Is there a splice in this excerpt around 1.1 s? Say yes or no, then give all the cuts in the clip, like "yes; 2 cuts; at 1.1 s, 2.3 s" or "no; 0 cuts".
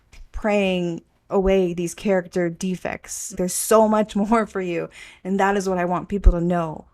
no; 1 cut; at 3.3 s